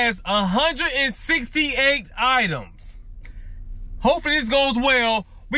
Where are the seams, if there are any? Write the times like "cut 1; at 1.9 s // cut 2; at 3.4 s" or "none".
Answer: none